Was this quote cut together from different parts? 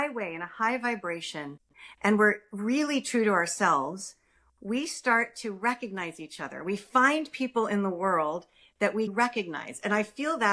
yes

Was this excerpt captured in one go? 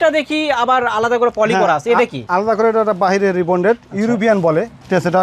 yes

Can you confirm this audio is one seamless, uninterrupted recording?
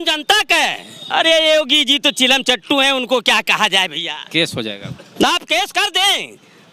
no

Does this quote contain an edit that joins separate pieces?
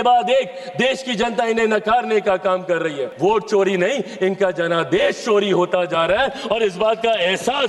yes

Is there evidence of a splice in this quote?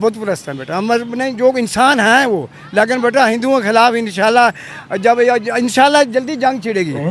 no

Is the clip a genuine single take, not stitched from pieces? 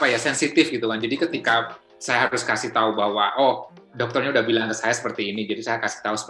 yes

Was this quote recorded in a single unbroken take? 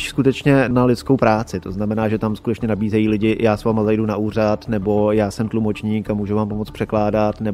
yes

